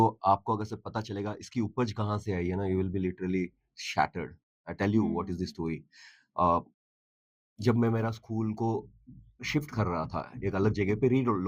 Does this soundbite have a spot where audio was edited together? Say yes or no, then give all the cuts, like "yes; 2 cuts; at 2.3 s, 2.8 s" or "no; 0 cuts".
no; 0 cuts